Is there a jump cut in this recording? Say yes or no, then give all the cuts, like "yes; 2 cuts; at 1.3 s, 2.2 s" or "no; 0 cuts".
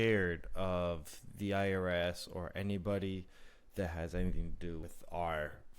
yes; 1 cut; at 4.8 s